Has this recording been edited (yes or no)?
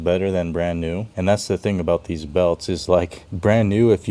no